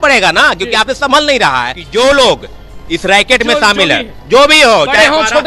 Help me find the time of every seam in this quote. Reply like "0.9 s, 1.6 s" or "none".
1.8 s